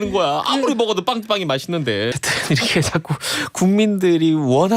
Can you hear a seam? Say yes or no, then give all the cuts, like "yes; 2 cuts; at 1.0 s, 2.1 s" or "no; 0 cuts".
yes; 1 cut; at 2.1 s